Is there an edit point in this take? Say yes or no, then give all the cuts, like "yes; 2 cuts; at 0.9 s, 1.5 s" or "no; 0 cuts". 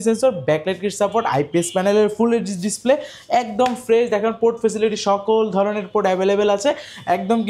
no; 0 cuts